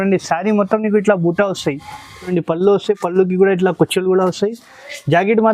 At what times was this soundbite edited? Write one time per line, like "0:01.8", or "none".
0:02.3

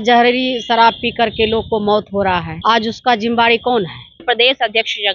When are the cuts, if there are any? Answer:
0:04.2

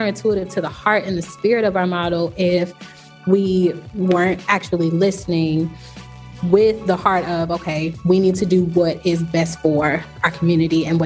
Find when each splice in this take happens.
none

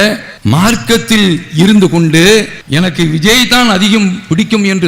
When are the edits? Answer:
0:02.6

